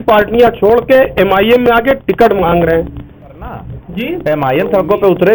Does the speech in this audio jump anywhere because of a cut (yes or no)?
yes